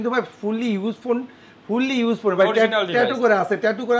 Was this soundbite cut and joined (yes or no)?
no